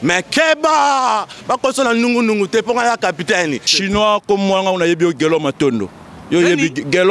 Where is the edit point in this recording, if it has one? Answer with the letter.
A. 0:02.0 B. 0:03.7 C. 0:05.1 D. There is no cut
B